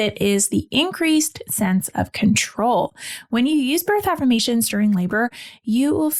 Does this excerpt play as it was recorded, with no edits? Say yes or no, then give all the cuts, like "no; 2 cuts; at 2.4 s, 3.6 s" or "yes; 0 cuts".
yes; 0 cuts